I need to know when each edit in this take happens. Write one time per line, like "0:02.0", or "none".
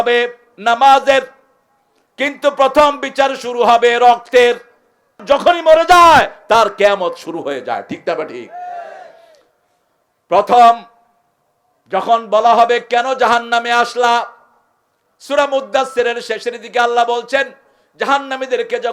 0:05.2